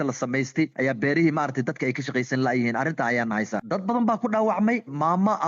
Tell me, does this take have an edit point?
no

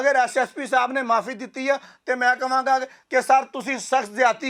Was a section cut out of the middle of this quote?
no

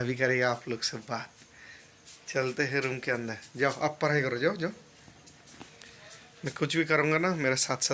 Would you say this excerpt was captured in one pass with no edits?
yes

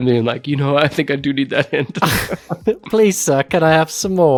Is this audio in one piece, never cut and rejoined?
yes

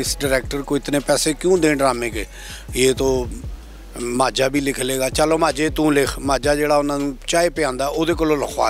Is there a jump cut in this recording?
no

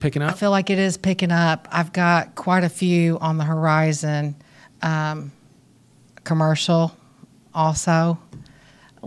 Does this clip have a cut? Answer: no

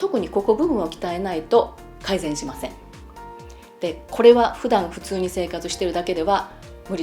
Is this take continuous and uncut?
yes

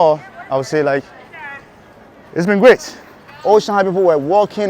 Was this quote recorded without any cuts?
no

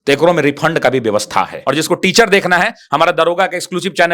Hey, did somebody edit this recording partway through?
yes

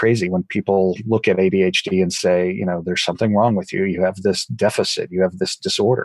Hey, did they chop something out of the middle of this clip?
no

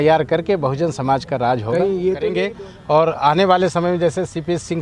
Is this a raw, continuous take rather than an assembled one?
no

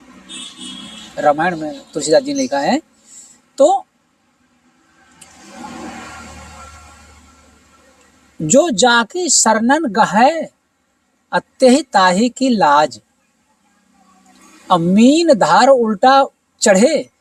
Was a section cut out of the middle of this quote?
no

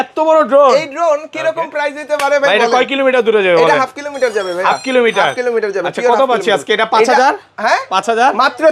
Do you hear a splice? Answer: no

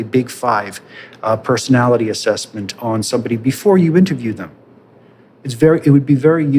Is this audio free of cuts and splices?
yes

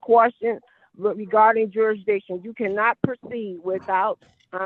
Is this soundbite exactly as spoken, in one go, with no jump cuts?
yes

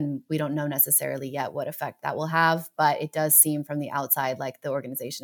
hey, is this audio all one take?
yes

